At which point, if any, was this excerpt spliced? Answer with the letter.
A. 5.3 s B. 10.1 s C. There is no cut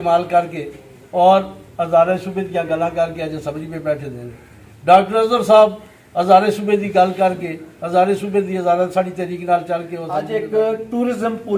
B